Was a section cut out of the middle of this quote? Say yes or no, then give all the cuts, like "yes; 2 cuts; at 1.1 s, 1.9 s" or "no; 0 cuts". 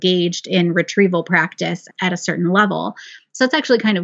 yes; 1 cut; at 1.9 s